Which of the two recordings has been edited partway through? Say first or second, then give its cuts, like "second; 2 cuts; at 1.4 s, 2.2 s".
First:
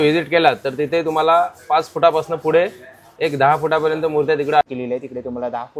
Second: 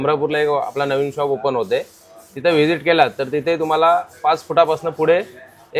first; 1 cut; at 4.6 s